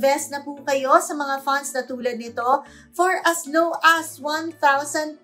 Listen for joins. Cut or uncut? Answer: uncut